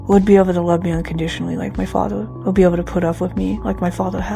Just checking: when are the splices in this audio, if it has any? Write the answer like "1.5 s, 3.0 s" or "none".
none